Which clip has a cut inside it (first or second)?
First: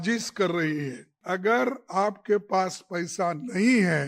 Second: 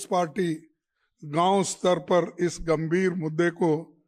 first